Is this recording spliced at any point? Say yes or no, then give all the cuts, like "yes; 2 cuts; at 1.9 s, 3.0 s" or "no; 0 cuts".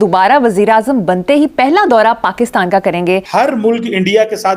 yes; 1 cut; at 3.3 s